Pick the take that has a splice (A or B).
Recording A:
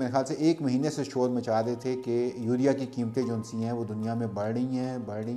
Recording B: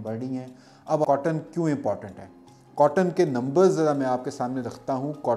B